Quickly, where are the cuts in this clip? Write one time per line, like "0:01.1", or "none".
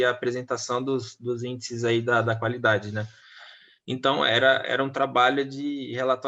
none